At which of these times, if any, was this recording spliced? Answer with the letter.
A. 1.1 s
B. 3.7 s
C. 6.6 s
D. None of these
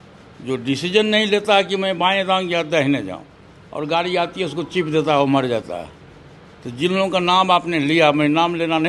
D